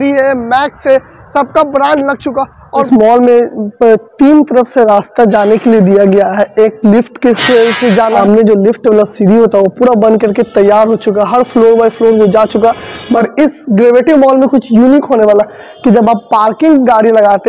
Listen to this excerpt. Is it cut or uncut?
cut